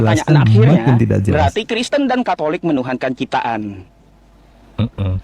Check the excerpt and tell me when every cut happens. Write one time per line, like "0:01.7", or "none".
0:01.3